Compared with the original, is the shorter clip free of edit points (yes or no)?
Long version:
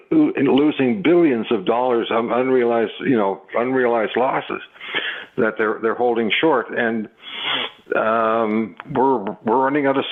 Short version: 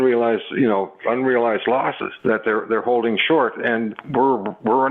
no